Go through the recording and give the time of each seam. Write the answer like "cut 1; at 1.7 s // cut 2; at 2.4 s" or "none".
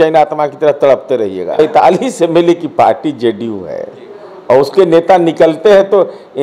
cut 1; at 1.6 s